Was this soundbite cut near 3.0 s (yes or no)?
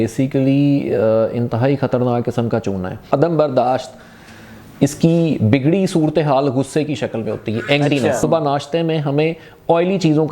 yes